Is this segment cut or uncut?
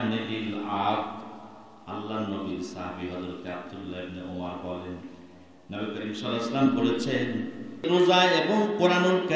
cut